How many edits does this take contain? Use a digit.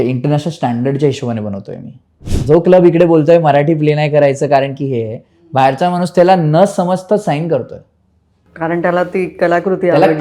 1